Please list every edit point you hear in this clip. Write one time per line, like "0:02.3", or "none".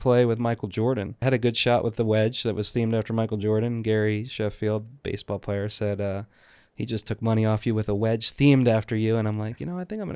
0:01.2